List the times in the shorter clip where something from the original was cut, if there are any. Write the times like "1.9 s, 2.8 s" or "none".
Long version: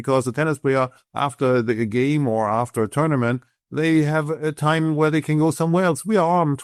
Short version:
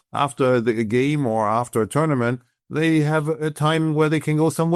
none